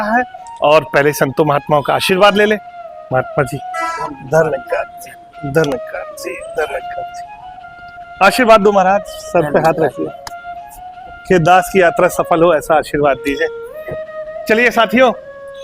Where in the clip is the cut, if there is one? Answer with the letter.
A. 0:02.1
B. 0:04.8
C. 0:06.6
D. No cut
D